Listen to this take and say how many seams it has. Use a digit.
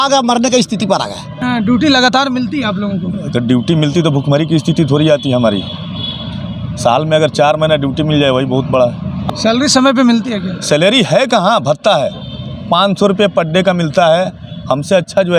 2